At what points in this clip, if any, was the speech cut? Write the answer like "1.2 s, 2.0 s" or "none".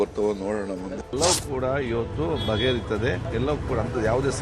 1.0 s, 3.2 s